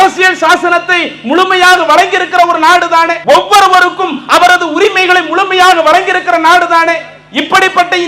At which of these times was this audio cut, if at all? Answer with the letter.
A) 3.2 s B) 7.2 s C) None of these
A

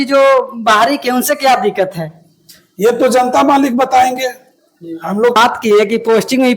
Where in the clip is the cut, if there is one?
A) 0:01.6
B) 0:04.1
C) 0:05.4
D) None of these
C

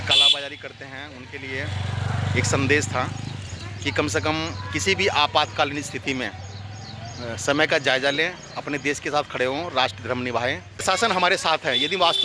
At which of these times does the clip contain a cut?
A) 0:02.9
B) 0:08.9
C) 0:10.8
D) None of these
C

